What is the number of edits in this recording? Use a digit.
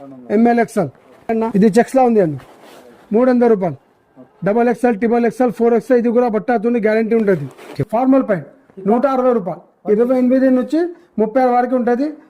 2